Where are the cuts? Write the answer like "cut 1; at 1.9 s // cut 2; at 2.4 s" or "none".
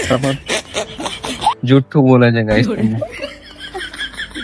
cut 1; at 1.6 s